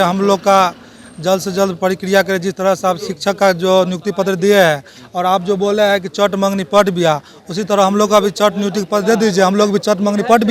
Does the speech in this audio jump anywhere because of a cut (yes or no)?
no